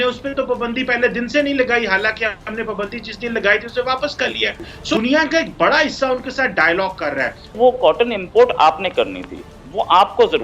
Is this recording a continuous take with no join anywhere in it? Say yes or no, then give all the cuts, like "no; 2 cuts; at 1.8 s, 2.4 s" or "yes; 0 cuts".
no; 2 cuts; at 5.0 s, 7.5 s